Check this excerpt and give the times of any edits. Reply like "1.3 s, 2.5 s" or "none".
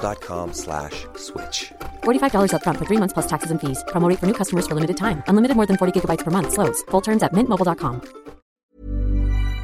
8.5 s